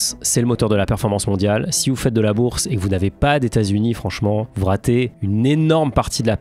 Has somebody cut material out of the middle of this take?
no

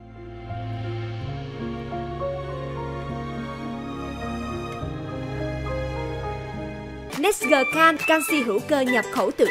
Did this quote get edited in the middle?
yes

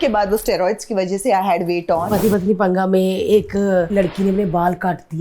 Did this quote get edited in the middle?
yes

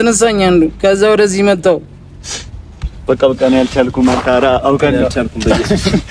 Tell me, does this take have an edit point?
no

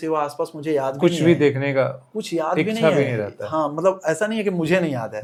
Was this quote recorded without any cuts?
yes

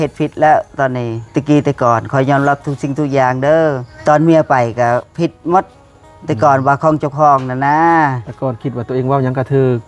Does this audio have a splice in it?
yes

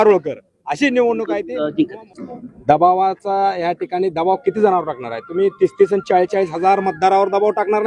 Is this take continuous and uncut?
no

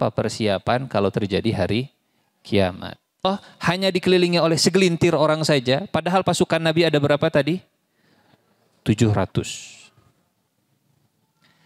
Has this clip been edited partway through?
yes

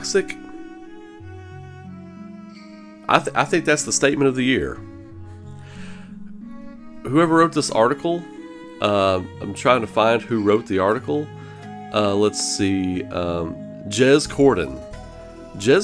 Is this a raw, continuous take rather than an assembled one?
yes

